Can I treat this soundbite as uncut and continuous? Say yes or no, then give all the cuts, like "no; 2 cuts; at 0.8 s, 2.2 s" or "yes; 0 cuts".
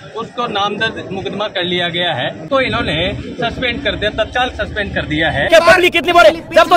no; 2 cuts; at 2.5 s, 5.5 s